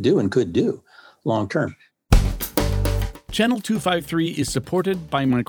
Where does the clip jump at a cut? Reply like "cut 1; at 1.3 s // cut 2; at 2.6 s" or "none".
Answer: cut 1; at 1.9 s